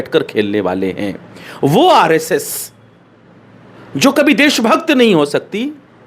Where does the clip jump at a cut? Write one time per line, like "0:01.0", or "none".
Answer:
none